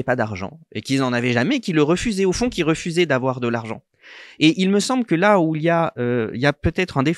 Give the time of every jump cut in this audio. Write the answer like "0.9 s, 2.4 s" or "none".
none